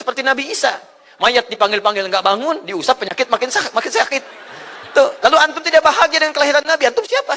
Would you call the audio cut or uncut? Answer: uncut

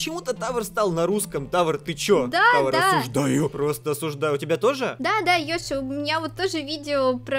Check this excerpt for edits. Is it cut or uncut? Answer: uncut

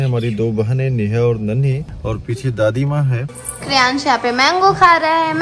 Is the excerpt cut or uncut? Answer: cut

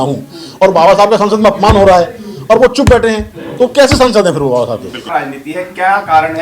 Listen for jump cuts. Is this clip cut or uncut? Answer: cut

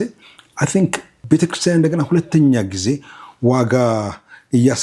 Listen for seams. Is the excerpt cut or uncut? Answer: cut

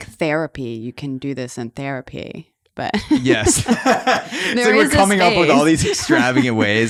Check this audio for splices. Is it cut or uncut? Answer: uncut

